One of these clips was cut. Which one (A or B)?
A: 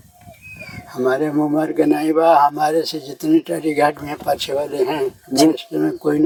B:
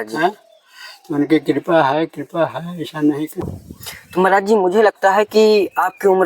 B